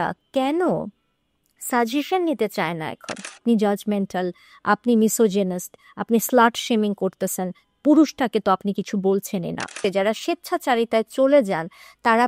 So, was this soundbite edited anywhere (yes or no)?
yes